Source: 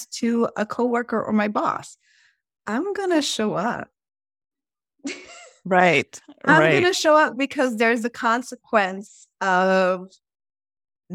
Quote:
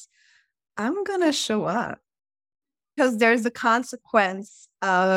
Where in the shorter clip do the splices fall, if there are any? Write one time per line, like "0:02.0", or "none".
0:02.9